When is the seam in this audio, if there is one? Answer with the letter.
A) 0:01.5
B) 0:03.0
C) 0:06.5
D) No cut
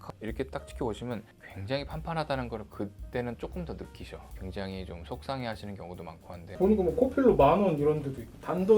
C